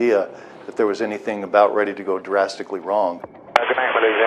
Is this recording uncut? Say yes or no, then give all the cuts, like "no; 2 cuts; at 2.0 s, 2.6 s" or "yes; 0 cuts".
no; 1 cut; at 3.3 s